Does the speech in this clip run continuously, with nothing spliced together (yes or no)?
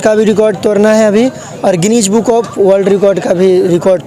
yes